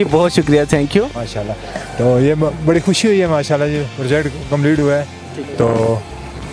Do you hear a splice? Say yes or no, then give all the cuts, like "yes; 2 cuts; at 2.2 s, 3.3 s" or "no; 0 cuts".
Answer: no; 0 cuts